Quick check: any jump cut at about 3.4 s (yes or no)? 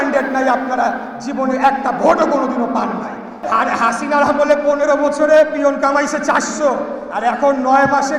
yes